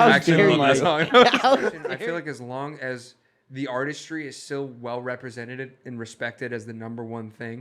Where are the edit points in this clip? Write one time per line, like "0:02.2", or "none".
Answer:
0:01.8